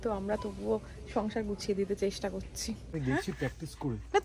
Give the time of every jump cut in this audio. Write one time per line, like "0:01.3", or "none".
0:02.9